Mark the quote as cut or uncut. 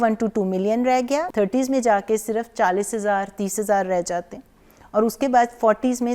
cut